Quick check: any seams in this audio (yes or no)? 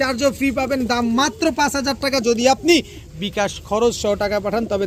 no